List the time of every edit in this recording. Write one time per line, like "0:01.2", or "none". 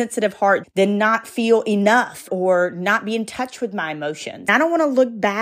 0:02.3
0:04.5